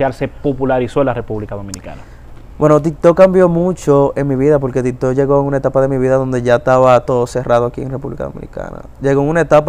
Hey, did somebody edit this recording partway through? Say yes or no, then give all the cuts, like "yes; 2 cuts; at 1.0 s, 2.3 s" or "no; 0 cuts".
no; 0 cuts